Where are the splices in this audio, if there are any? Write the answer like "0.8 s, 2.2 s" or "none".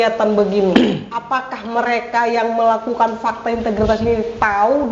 none

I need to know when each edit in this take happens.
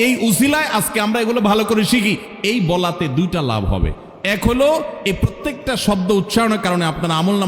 2.3 s

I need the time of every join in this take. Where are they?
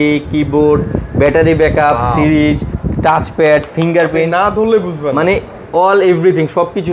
none

